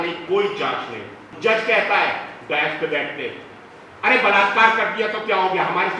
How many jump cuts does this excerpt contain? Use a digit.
1